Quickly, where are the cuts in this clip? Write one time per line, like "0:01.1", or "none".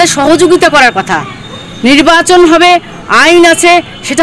none